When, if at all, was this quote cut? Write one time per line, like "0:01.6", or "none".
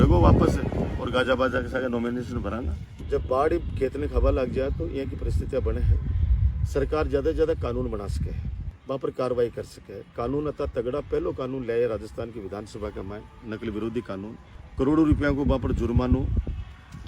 0:02.8